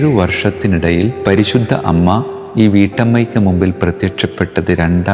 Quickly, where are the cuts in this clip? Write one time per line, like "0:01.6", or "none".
none